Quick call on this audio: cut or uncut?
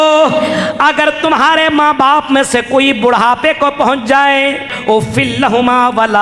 cut